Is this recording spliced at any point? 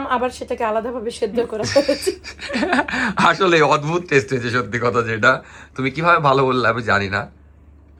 no; 0 cuts

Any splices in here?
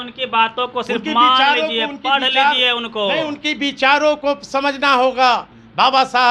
no; 0 cuts

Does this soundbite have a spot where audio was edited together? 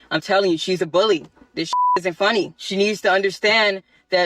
yes; 1 cut; at 2.6 s

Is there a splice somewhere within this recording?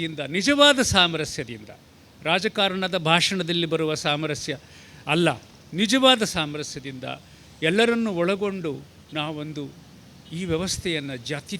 no; 0 cuts

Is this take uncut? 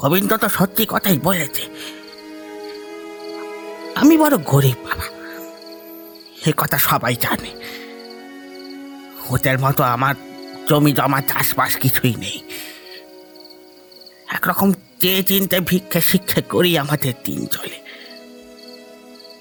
yes; 0 cuts

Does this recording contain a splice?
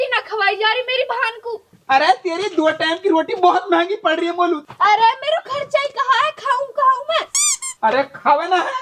no; 0 cuts

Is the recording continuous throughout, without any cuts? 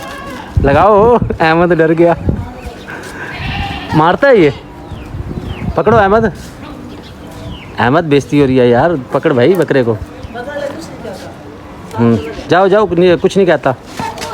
yes; 0 cuts

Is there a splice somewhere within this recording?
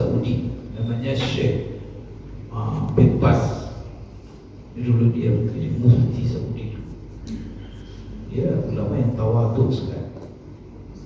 no; 0 cuts

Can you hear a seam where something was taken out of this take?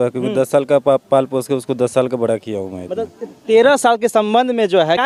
no; 0 cuts

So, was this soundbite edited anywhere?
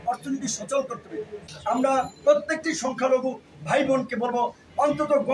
yes; 1 cut; at 1.4 s

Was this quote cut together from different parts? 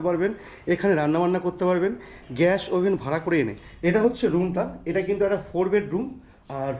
yes; 1 cut; at 3.6 s

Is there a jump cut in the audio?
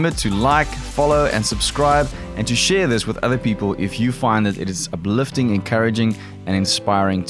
no; 0 cuts

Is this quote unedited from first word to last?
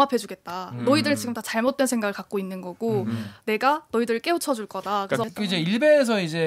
no; 1 cut; at 5.2 s

